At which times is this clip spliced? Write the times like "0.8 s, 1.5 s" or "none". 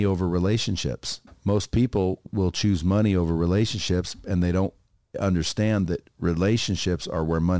1.2 s, 2.3 s